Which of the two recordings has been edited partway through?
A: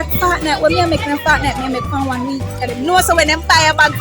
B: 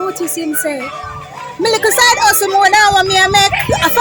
A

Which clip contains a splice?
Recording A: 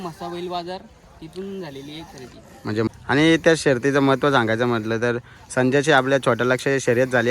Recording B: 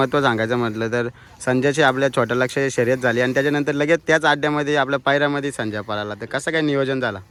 A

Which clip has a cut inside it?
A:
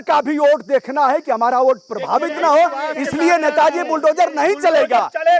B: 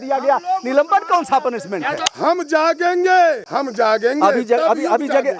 B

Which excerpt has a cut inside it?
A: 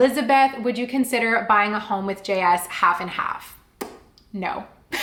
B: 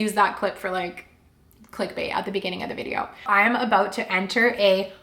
B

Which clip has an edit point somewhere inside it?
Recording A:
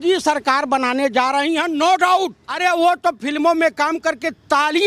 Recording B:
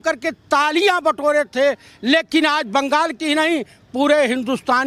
A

